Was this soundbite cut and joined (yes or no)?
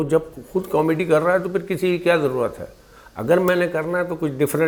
no